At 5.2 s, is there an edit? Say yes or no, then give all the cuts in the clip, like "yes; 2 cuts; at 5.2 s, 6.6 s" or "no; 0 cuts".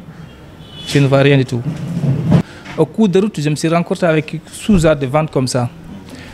no; 1 cut; at 2.4 s